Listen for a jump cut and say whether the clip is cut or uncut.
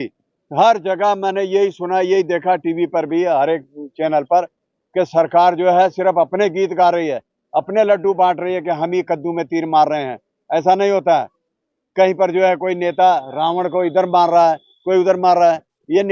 uncut